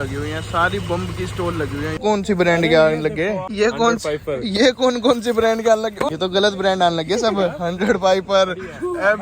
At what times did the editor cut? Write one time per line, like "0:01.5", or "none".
0:02.0
0:03.5
0:06.1